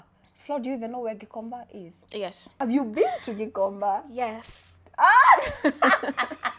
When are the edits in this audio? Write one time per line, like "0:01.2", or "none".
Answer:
none

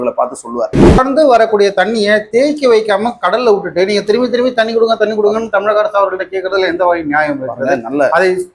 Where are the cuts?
0:01.0

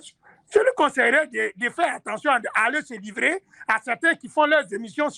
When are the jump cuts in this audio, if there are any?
none

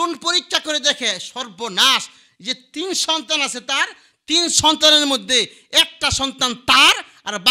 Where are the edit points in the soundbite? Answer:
none

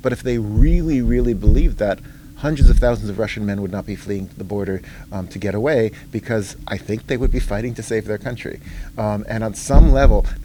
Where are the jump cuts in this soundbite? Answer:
none

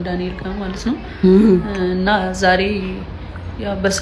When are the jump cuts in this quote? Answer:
none

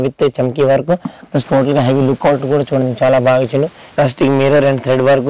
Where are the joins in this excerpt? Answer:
0:03.8

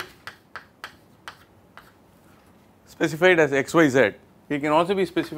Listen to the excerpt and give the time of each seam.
0:03.2

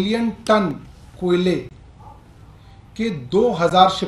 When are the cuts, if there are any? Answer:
none

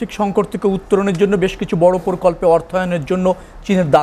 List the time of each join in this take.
none

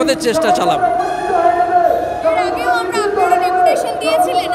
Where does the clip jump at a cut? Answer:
none

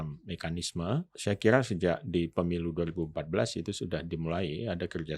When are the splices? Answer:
0:01.1

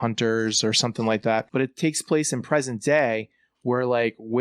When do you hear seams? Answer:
0:01.5

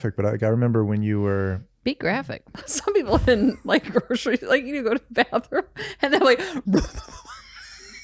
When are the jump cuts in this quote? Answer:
0:02.5

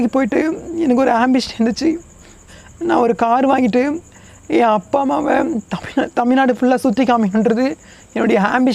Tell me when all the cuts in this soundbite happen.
none

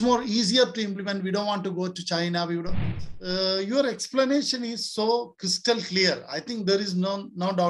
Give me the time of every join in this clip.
0:02.9

